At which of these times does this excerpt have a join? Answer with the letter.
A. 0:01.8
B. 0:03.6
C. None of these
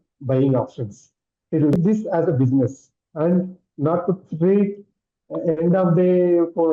A